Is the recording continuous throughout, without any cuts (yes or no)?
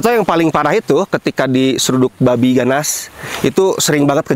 yes